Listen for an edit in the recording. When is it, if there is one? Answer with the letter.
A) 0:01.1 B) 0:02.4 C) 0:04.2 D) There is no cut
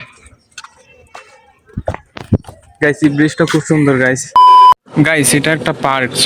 C